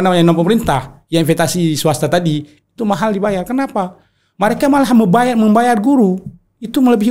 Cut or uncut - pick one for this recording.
uncut